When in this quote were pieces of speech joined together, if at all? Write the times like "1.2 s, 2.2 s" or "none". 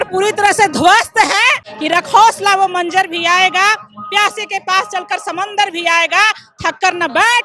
1.7 s